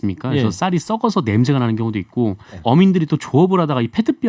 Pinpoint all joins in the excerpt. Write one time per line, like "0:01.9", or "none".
0:02.6